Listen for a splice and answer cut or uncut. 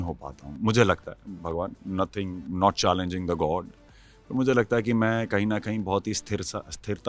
uncut